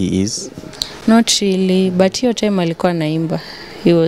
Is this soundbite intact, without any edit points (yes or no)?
yes